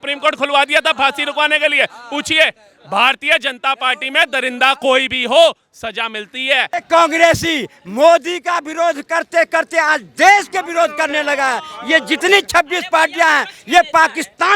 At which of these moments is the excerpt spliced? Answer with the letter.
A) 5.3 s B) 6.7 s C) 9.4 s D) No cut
B